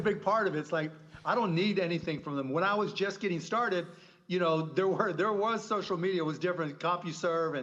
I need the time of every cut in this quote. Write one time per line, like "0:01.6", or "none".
none